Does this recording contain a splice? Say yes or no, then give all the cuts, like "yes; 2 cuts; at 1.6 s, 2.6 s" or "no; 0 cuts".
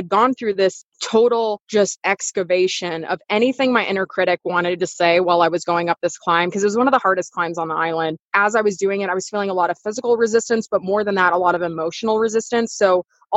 yes; 3 cuts; at 0.9 s, 1.6 s, 8.2 s